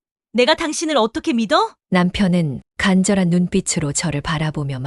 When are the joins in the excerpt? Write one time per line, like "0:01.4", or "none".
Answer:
none

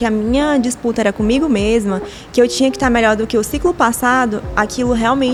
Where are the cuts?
none

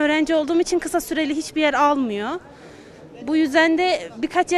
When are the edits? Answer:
none

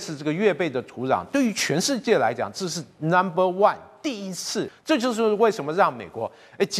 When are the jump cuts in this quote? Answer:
0:04.7

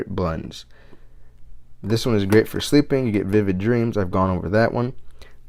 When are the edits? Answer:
none

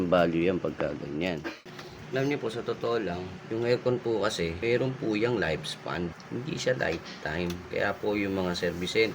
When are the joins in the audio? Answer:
0:01.5
0:03.3
0:04.6
0:06.2

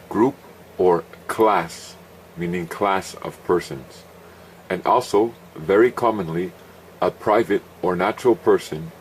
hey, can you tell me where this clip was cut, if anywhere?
0:05.2

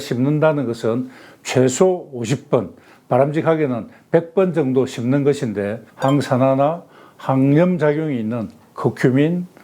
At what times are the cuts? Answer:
0:05.8

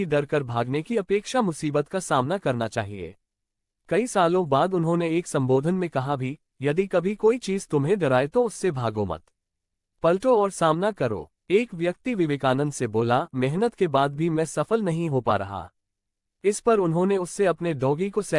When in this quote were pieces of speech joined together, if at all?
0:11.3

